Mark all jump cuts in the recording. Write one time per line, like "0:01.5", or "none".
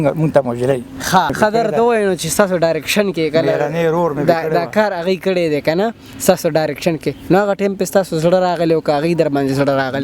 0:01.3